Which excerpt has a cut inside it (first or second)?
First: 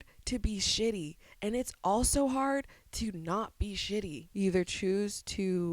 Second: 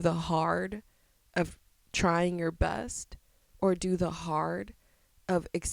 first